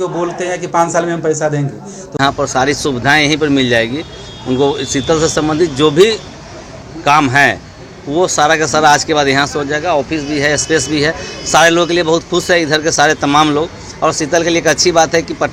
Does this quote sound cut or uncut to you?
uncut